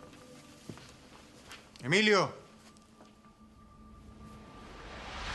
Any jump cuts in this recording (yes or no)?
yes